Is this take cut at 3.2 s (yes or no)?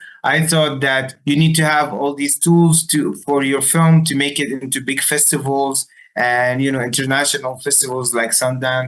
no